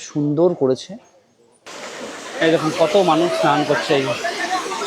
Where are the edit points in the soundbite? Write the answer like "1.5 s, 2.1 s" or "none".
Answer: 1.4 s